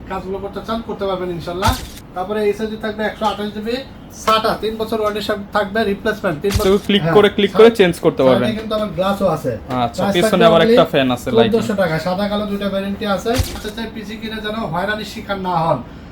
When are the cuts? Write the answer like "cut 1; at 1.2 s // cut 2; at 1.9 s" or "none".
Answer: cut 1; at 1.9 s // cut 2; at 6.6 s // cut 3; at 13.6 s